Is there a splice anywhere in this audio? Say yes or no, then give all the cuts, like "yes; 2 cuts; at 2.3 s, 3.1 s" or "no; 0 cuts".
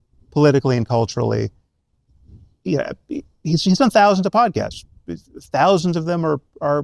no; 0 cuts